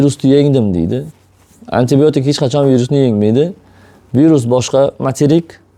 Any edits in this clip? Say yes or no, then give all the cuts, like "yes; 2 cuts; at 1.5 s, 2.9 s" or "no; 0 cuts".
no; 0 cuts